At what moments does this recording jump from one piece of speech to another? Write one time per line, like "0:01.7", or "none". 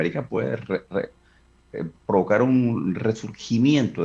none